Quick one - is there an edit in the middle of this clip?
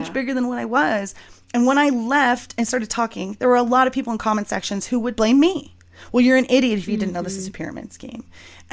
no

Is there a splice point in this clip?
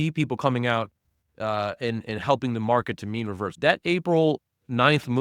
yes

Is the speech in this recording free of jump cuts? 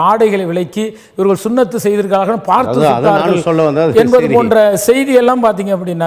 yes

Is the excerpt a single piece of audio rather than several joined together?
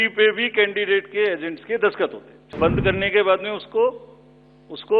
no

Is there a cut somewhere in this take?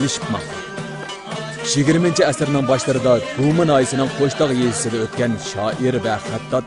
no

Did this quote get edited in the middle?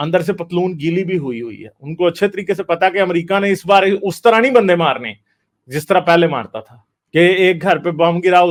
no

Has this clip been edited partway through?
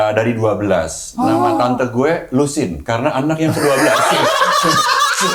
no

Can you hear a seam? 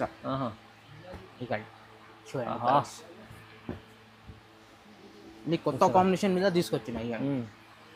no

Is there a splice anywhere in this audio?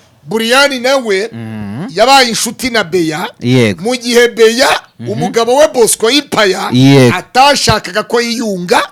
no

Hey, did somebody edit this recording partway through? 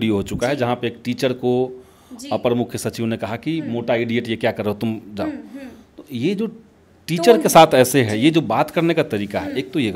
no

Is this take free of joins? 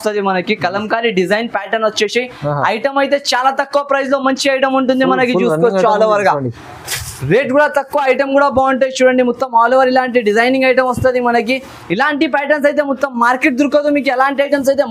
yes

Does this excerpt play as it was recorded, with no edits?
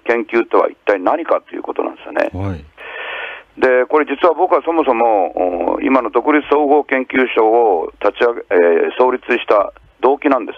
no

